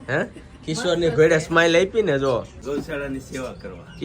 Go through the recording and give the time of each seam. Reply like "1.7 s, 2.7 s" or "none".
2.6 s